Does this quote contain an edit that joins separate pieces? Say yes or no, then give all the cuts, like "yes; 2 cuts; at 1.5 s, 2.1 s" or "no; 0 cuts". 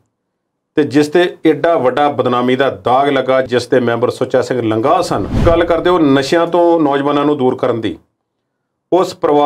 yes; 1 cut; at 5.4 s